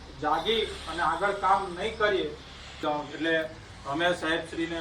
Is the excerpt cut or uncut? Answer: cut